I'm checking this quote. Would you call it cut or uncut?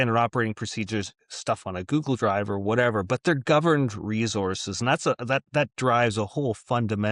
uncut